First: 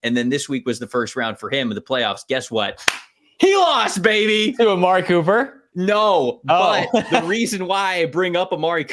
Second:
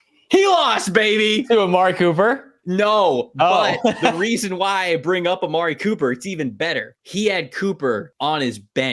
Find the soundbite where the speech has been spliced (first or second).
second